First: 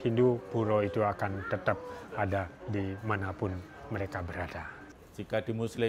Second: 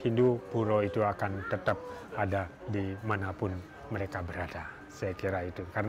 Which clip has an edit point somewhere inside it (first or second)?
first